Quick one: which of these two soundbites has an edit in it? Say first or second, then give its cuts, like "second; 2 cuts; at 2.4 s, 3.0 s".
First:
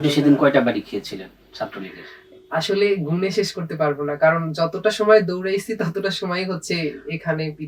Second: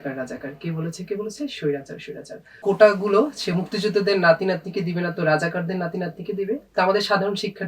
second; 1 cut; at 2.6 s